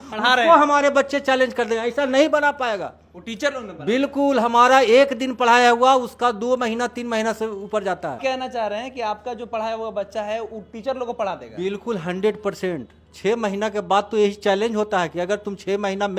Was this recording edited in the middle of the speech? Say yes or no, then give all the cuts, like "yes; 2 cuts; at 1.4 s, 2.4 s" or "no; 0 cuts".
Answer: no; 0 cuts